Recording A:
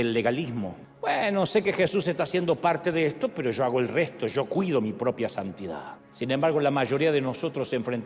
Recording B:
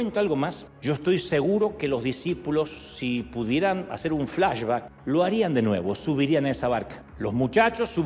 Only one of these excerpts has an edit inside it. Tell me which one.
B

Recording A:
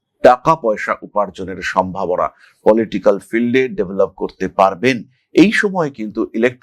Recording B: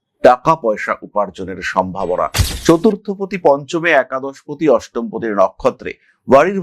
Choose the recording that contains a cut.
B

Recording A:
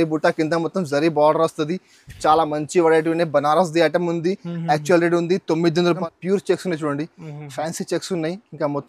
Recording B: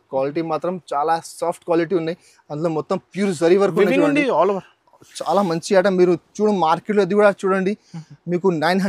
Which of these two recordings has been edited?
A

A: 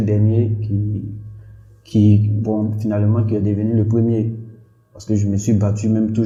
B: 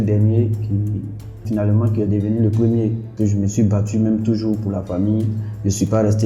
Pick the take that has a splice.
B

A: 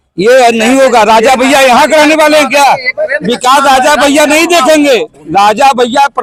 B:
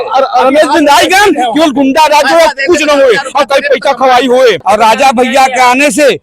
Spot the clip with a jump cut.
B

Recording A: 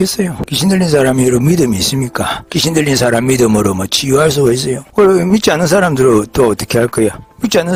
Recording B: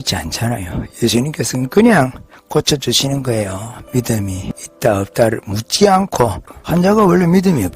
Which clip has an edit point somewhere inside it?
B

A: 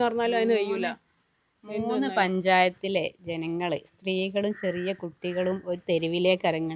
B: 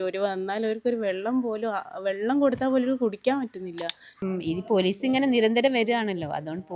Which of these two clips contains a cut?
B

